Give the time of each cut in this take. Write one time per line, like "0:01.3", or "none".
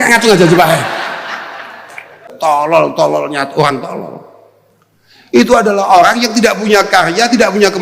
0:02.3